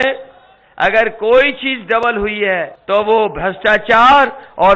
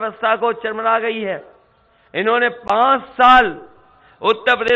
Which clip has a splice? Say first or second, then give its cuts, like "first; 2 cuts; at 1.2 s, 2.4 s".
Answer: first; 1 cut; at 2.8 s